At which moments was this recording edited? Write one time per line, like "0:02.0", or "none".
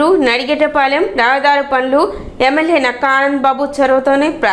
none